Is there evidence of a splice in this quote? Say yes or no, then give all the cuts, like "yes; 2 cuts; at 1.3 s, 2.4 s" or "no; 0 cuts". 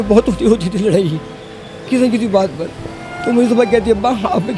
no; 0 cuts